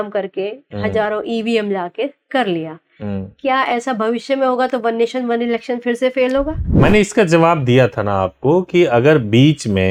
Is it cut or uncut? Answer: uncut